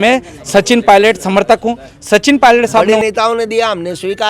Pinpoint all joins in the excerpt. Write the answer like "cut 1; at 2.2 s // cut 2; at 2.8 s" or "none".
cut 1; at 2.9 s